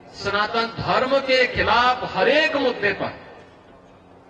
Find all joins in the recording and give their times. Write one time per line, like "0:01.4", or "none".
none